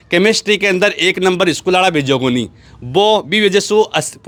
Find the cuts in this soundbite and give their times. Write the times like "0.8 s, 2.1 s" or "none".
none